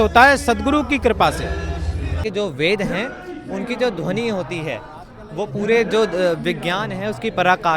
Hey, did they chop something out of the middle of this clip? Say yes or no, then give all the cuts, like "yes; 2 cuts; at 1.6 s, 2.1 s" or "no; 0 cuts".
yes; 1 cut; at 2.2 s